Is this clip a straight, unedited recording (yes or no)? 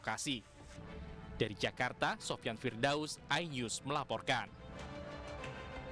yes